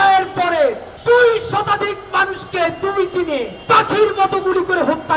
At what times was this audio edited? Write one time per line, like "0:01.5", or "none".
0:00.9
0:03.5

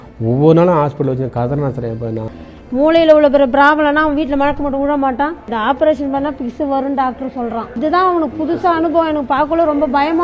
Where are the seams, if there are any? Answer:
0:02.3
0:05.4
0:07.8

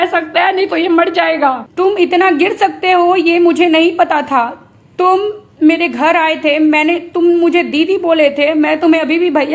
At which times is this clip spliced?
0:01.7

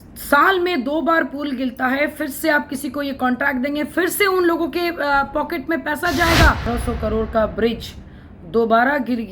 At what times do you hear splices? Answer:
0:06.7

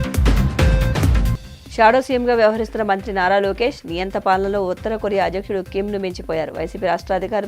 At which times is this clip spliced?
0:01.3

